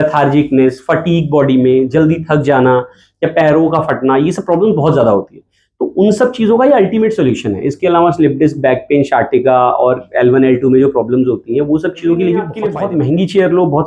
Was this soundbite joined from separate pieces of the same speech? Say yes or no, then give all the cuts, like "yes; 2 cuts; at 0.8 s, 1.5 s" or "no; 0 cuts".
yes; 1 cut; at 12.6 s